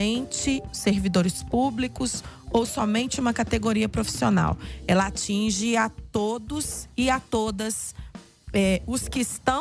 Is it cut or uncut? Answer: uncut